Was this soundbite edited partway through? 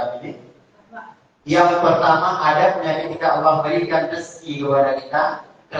no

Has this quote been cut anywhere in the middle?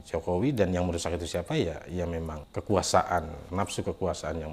yes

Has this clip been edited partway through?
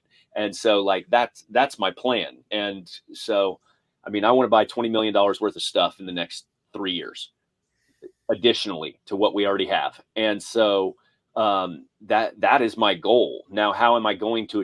no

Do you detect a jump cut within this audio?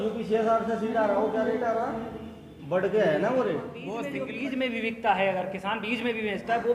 yes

